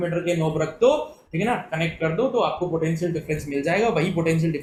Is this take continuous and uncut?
yes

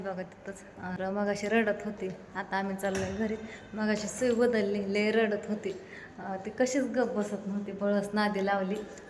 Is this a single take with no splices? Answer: no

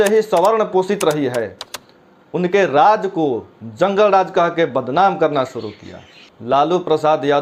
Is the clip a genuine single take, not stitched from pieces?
yes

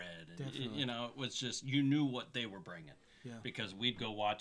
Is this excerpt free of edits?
yes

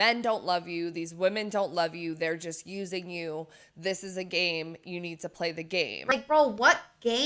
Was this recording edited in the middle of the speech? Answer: yes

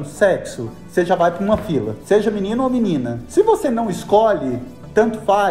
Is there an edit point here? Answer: no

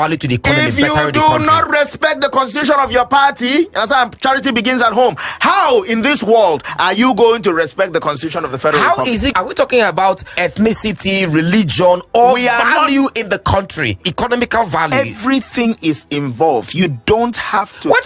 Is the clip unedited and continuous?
no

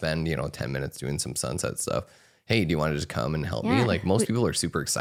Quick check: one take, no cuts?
yes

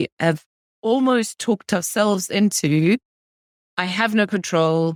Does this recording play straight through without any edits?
yes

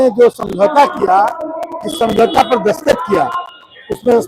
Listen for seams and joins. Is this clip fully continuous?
yes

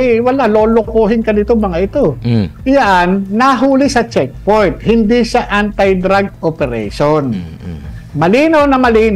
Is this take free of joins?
no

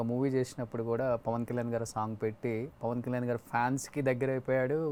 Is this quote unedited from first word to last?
yes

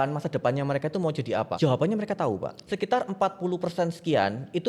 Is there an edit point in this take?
yes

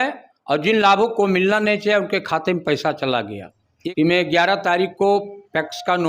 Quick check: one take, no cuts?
no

